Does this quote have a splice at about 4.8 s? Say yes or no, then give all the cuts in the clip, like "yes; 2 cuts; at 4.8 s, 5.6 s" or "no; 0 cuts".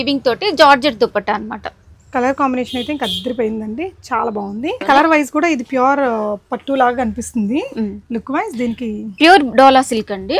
yes; 1 cut; at 4.8 s